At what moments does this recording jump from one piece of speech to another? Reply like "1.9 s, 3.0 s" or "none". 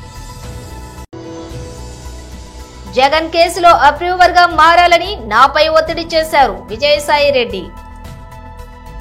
2.8 s, 7.7 s